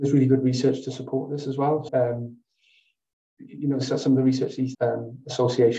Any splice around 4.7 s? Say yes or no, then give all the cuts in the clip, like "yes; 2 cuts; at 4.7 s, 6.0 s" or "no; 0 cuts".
yes; 2 cuts; at 1.9 s, 4.7 s